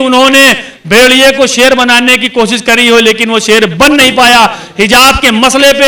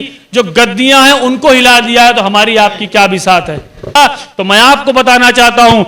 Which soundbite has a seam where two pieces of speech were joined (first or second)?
second